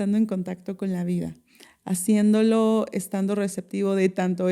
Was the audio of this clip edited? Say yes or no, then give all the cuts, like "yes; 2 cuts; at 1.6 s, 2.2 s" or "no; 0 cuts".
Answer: no; 0 cuts